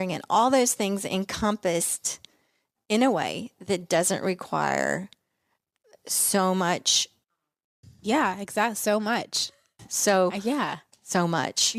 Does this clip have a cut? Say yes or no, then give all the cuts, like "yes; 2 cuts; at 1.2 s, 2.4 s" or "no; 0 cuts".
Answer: no; 0 cuts